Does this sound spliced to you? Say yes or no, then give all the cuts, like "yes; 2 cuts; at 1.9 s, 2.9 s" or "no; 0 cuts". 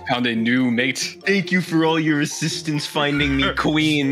yes; 1 cut; at 1.1 s